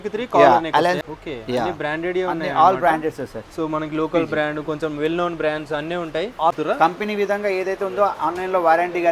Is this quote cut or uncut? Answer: cut